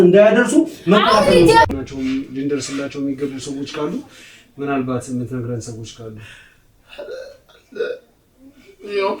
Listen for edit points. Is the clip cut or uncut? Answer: cut